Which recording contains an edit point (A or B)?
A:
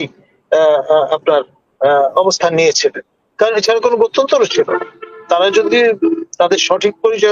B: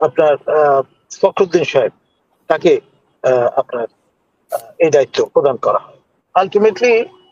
B